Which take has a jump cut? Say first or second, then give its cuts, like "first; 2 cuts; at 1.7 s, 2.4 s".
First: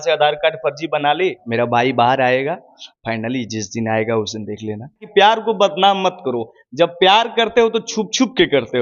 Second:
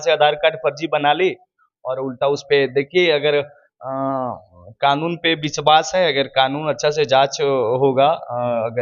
first; 2 cuts; at 1.4 s, 5.0 s